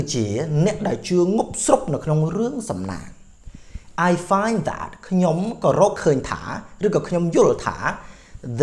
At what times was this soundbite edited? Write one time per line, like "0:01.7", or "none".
none